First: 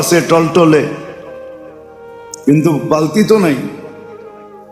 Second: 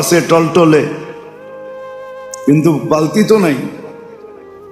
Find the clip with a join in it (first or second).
second